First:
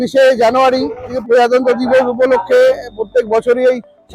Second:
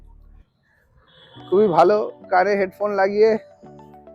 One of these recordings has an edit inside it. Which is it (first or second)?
first